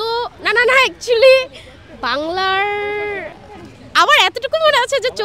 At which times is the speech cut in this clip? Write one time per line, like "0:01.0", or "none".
none